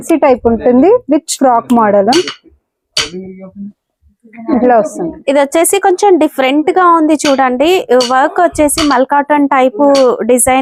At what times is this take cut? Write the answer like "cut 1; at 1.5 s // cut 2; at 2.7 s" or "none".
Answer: none

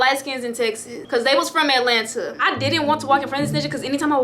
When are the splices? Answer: cut 1; at 0.9 s // cut 2; at 2.3 s

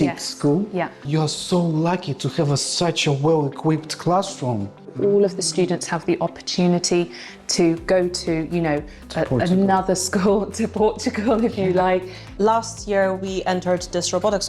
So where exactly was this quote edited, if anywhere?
cut 1; at 1.1 s // cut 2; at 4.9 s // cut 3; at 12.3 s

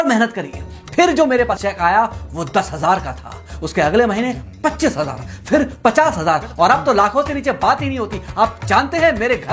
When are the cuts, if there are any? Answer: cut 1; at 1.5 s

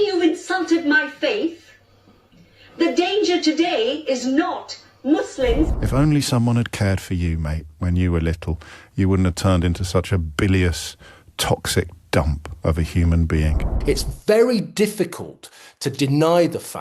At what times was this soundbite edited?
cut 1; at 5.8 s // cut 2; at 13.7 s

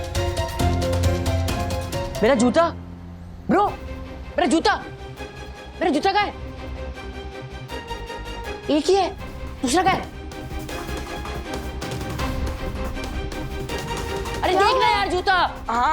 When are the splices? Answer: none

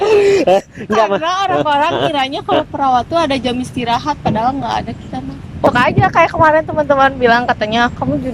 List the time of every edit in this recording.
cut 1; at 5.7 s

